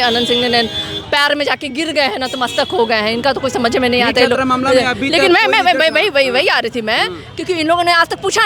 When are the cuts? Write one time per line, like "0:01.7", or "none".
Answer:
none

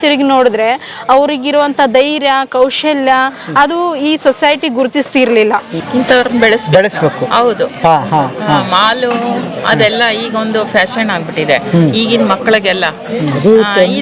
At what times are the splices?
0:05.8

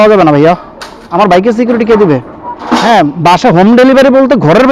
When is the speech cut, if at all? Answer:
0:01.0
0:02.8

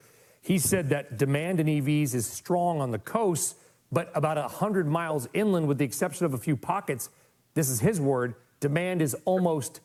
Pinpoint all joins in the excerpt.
none

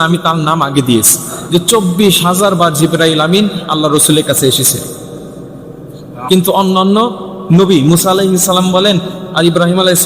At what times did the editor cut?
0:01.4

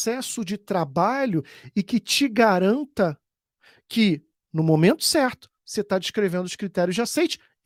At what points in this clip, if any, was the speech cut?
none

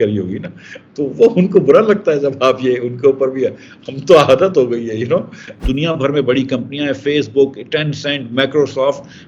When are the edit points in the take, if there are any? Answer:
0:05.6

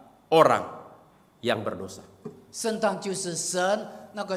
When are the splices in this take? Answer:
none

